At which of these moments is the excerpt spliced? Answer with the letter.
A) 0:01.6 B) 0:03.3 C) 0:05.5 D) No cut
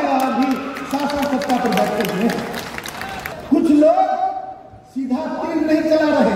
B